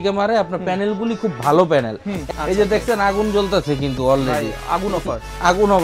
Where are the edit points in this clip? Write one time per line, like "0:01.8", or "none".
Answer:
0:02.1